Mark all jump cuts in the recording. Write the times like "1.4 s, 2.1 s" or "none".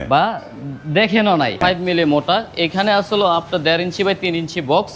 1.6 s